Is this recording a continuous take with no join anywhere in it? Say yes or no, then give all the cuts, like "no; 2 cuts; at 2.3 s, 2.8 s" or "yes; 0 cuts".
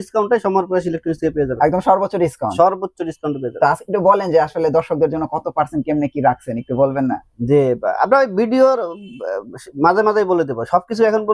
yes; 0 cuts